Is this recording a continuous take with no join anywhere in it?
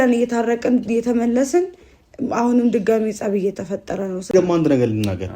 no; 1 cut; at 4.3 s

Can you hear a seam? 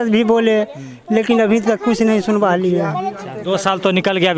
yes; 1 cut; at 3.2 s

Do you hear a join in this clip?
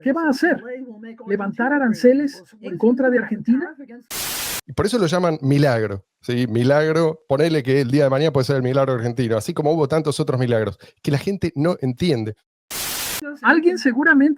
yes; 2 cuts; at 4.4 s, 12.7 s

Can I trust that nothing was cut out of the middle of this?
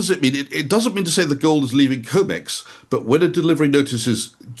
yes; 0 cuts

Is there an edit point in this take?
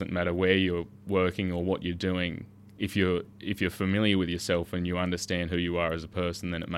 no; 0 cuts

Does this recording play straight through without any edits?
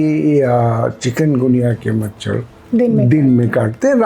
no; 1 cut; at 2.5 s

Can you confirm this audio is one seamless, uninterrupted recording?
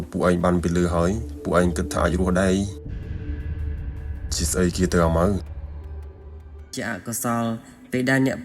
no; 1 cut; at 6.8 s

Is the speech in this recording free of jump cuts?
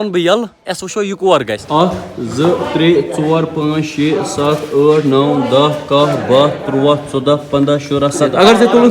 no; 1 cut; at 1.6 s

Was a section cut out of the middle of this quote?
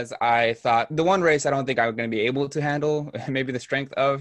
no; 0 cuts

